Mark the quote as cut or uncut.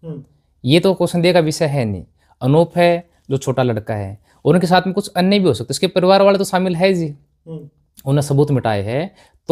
uncut